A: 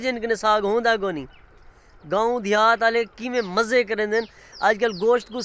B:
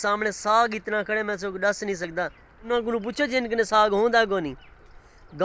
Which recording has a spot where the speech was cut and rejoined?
B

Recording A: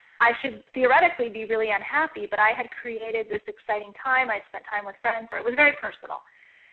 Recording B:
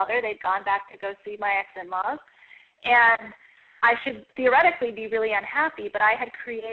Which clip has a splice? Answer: A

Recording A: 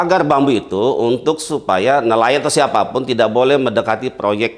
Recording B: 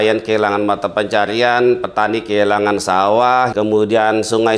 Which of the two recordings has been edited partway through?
B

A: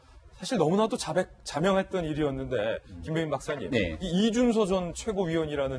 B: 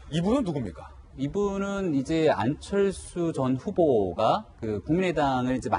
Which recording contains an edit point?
B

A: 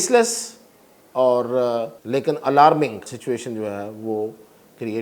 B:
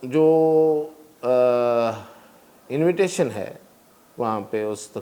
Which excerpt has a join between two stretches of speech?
A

